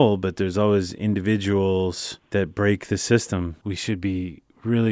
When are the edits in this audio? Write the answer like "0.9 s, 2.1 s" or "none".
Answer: 2.1 s, 3.6 s